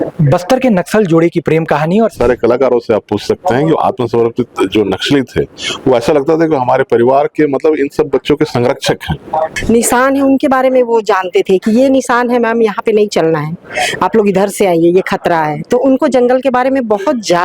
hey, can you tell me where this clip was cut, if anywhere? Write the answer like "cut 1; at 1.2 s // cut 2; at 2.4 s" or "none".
cut 1; at 2.1 s // cut 2; at 9.6 s

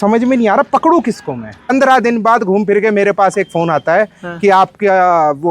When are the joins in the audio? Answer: cut 1; at 1.7 s

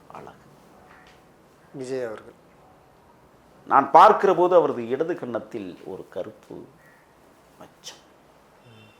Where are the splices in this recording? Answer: cut 1; at 3.3 s

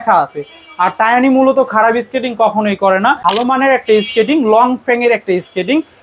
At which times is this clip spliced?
cut 1; at 3.2 s

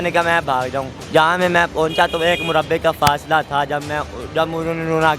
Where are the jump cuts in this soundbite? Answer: cut 1; at 1.0 s

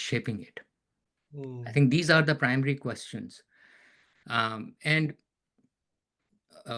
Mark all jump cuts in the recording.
none

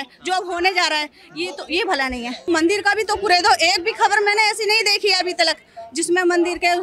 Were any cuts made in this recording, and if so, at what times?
cut 1; at 2.5 s

